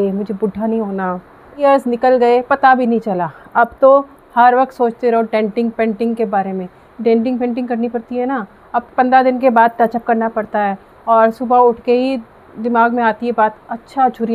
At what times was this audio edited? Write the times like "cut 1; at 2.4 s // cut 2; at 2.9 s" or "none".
cut 1; at 1.6 s